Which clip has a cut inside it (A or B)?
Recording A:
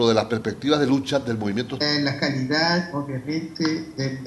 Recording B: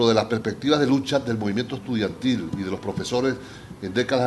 B